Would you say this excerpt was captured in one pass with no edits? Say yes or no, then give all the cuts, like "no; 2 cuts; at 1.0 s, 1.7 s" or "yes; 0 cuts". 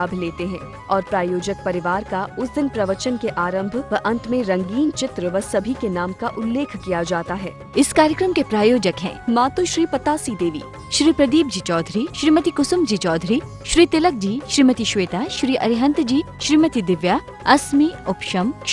no; 1 cut; at 7.5 s